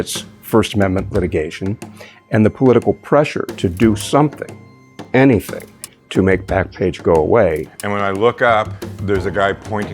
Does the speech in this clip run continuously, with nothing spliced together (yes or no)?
no